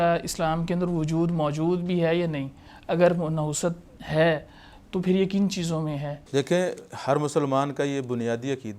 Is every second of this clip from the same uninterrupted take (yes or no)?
yes